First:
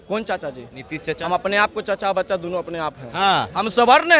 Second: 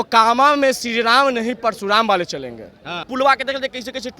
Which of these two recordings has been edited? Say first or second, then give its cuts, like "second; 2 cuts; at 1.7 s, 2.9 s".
second; 1 cut; at 3.1 s